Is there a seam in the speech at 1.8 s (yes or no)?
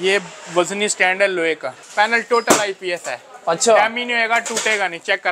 yes